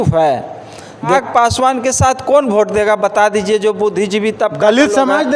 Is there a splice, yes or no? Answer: yes